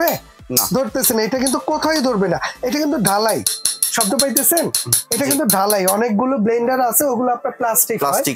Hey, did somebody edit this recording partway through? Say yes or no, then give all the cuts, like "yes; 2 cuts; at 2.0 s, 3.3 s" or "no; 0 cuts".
no; 0 cuts